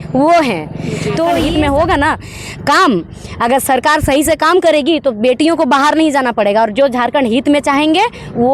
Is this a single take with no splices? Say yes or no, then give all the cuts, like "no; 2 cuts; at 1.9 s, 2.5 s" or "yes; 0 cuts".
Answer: no; 1 cut; at 1.4 s